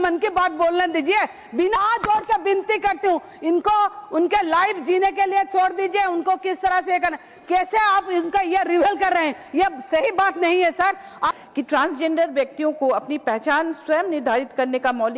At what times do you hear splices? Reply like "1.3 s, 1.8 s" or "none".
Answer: 1.8 s, 11.3 s